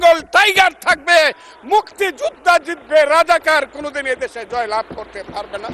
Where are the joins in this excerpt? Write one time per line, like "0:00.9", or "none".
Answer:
none